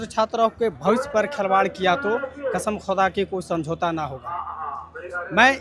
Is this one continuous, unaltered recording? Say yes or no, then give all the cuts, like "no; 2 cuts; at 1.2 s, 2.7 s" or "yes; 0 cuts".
yes; 0 cuts